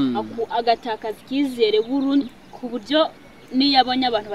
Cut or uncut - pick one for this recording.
uncut